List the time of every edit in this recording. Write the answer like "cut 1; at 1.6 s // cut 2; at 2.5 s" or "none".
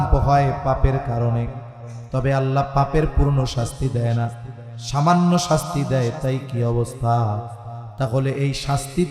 none